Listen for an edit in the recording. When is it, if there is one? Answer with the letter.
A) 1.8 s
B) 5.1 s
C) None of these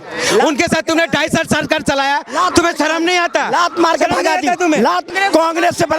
B